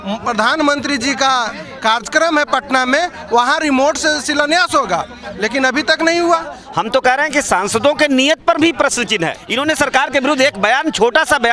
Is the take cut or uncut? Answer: cut